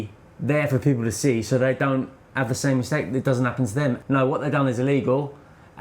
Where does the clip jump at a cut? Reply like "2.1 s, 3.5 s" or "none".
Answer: 4.0 s